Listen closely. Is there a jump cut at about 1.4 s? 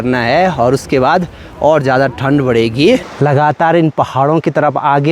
no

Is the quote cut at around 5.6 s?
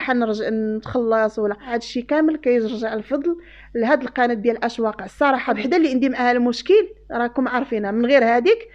yes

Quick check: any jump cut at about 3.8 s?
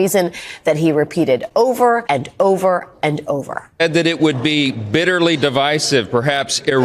yes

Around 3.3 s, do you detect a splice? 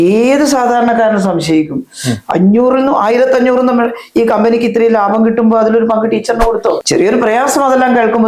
no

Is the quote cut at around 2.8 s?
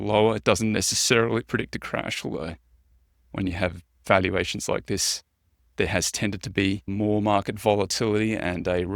no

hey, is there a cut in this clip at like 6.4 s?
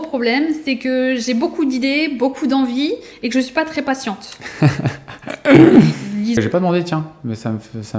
yes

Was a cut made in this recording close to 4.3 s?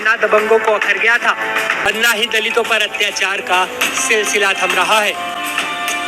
no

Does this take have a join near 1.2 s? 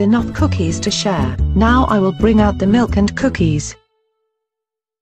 no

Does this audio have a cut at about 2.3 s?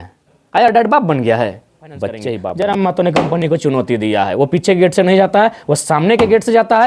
yes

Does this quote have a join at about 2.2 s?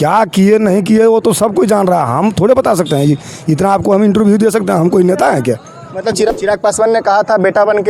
no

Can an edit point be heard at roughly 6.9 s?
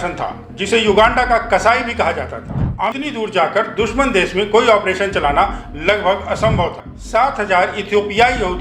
yes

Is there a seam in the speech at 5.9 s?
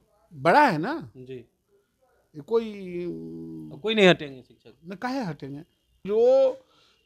yes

